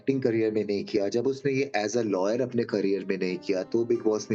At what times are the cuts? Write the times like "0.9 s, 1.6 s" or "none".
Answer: none